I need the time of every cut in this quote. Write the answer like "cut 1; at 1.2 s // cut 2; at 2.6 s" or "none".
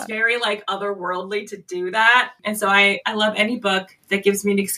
none